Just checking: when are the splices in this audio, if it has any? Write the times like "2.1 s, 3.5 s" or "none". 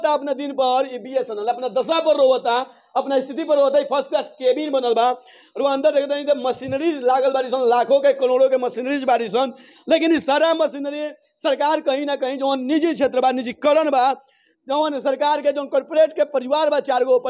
none